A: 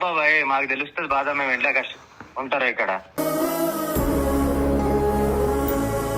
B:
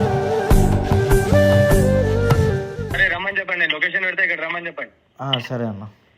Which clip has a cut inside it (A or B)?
B